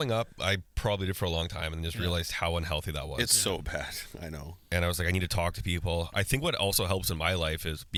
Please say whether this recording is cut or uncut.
uncut